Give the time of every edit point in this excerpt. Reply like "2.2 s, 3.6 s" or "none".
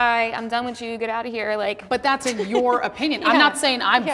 none